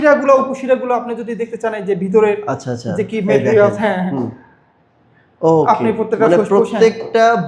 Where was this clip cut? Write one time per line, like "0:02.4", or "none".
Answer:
none